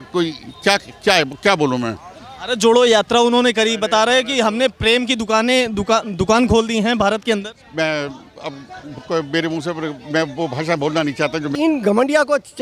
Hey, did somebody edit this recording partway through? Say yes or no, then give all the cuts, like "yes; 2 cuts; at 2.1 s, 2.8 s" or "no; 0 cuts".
yes; 1 cut; at 11.6 s